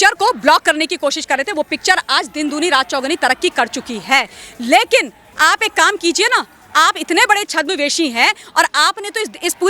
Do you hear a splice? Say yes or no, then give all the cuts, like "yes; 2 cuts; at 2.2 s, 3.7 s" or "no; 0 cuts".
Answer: no; 0 cuts